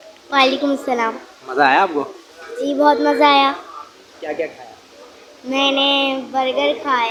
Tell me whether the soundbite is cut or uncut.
uncut